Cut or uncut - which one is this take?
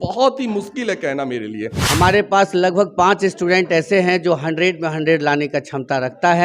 cut